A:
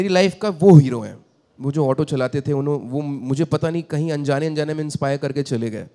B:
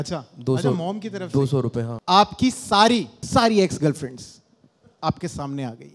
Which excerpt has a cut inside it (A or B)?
B